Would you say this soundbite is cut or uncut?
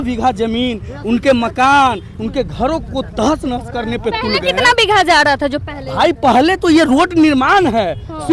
uncut